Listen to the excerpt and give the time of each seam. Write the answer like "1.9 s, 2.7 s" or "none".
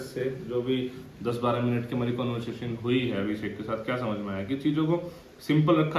none